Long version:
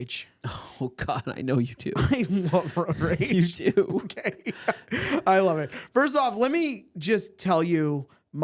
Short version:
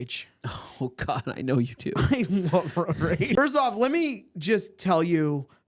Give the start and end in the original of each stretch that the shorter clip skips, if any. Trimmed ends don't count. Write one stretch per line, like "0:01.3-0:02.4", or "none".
0:03.3-0:05.9